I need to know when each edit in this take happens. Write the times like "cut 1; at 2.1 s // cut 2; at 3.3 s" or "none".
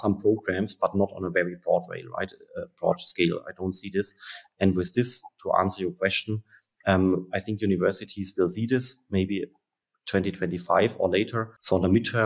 none